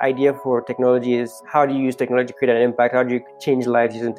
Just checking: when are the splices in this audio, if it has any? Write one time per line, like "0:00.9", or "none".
0:01.4
0:03.3